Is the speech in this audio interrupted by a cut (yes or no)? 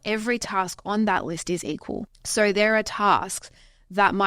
yes